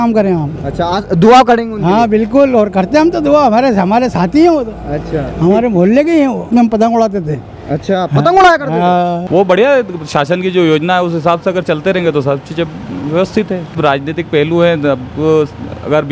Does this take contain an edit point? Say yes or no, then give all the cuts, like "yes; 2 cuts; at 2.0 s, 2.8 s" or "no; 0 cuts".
yes; 2 cuts; at 9.2 s, 13.7 s